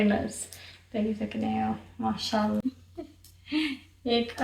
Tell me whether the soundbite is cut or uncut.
cut